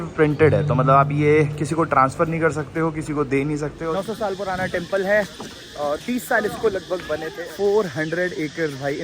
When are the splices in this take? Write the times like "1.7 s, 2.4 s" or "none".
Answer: 3.8 s, 7.4 s